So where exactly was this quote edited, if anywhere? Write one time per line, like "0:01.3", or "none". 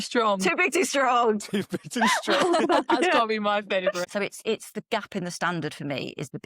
0:04.0